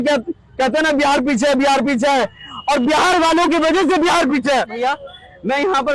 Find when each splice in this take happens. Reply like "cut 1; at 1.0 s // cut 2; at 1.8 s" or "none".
cut 1; at 4.8 s